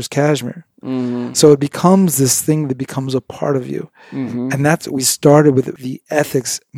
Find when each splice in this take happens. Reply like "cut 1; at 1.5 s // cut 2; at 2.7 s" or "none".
cut 1; at 5.7 s